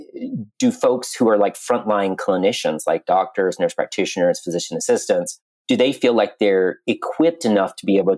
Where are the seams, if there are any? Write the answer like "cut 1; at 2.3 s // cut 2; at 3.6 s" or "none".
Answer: none